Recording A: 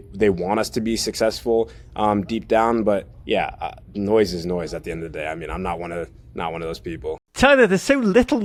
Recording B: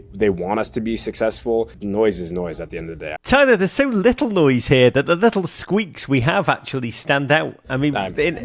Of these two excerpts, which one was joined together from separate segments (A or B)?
B